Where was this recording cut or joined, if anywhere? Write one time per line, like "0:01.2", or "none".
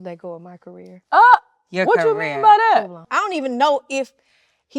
0:03.0